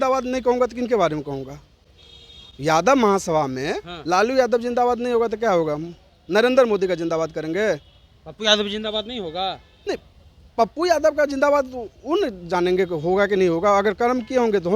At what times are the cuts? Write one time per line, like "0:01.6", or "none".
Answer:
none